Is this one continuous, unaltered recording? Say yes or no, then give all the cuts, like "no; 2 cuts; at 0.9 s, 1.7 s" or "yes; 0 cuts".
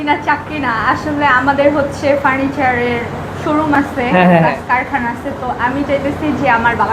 yes; 0 cuts